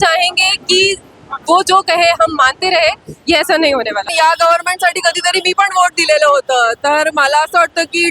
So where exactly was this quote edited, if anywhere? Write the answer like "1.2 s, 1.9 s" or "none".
4.1 s